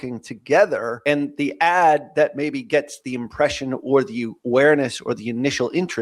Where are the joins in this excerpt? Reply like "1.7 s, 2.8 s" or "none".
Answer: 0.9 s